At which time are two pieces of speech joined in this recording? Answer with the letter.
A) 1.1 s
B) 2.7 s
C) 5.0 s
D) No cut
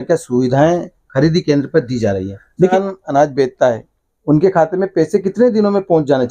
B